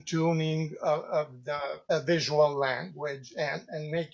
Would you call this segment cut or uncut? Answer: cut